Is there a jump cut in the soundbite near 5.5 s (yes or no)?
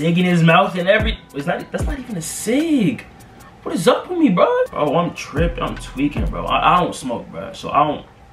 no